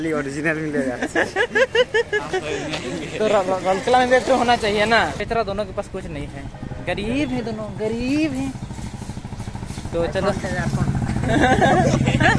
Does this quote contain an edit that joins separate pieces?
yes; 1 cut; at 5.2 s

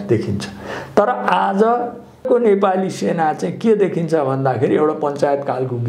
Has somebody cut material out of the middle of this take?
yes; 1 cut; at 2.3 s

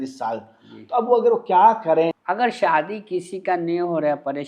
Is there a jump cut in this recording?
yes; 1 cut; at 2.2 s

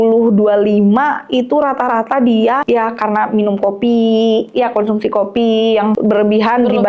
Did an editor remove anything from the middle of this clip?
yes; 2 cuts; at 2.6 s, 6.0 s

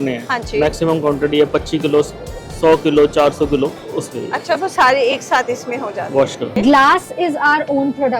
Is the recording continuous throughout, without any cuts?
no; 2 cuts; at 3.9 s, 6.5 s

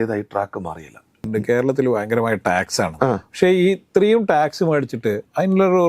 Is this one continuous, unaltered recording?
no; 1 cut; at 1.2 s

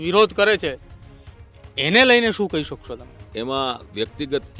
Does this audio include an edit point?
yes; 1 cut; at 3.1 s

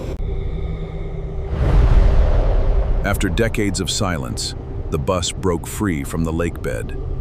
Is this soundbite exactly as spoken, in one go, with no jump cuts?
yes; 0 cuts

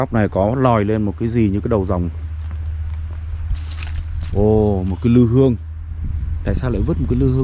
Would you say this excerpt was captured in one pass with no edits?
yes; 0 cuts

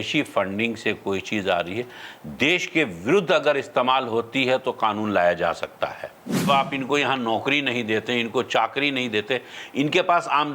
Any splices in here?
yes; 1 cut; at 6.5 s

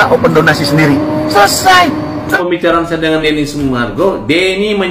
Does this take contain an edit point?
yes; 1 cut; at 2.3 s

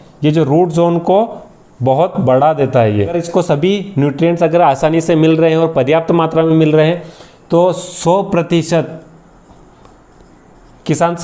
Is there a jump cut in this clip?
yes; 1 cut; at 3.2 s

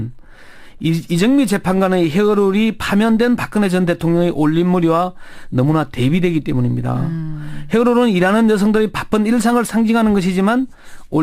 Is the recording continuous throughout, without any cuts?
no; 1 cut; at 9.8 s

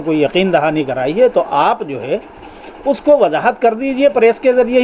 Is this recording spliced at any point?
no; 0 cuts

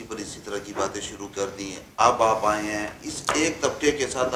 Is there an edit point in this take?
no; 0 cuts

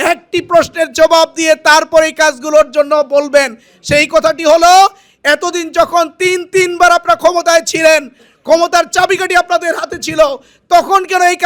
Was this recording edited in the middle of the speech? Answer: no; 0 cuts

